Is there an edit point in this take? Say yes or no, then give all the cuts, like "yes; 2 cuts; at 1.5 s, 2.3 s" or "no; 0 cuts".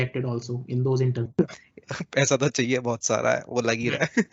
yes; 1 cut; at 1.3 s